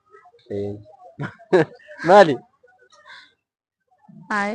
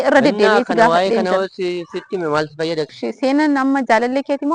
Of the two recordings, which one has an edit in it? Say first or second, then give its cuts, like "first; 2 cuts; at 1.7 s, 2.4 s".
second; 1 cut; at 2.9 s